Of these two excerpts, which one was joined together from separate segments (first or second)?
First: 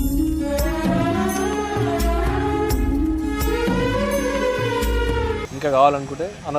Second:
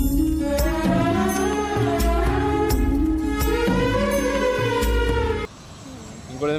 first